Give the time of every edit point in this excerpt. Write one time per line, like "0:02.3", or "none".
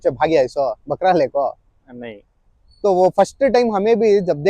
none